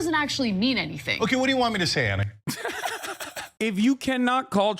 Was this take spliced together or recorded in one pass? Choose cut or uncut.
cut